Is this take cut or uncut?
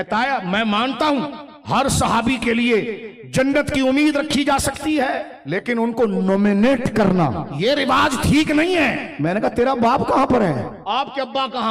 cut